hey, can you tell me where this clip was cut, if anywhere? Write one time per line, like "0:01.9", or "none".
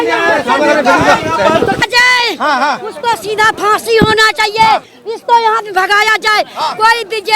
0:01.8